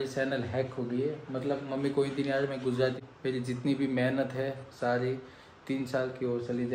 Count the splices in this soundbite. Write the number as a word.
one